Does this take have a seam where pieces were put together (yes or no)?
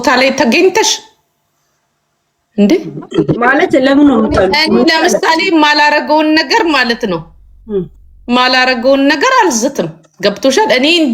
no